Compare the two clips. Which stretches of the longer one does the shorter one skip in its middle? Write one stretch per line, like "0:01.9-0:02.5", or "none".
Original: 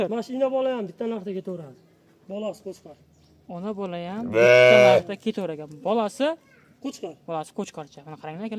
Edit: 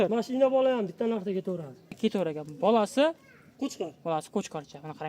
0:01.9-0:05.1